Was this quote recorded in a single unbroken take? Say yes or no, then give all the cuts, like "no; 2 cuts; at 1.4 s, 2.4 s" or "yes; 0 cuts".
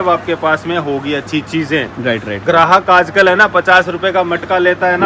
yes; 0 cuts